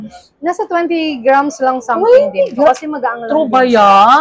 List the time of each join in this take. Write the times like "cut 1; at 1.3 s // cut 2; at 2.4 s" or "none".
none